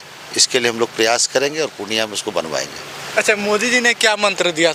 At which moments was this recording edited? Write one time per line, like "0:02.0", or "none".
none

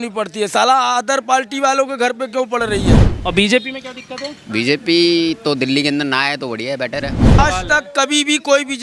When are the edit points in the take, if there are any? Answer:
0:03.0
0:07.4

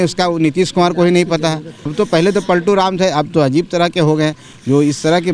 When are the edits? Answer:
0:01.9

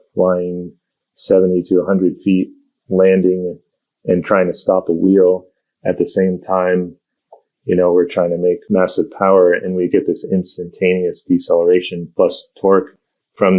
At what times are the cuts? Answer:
0:08.6
0:12.0

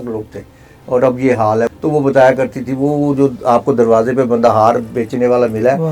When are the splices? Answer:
0:01.7

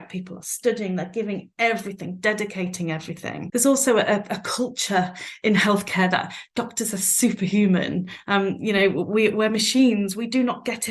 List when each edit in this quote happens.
0:03.4

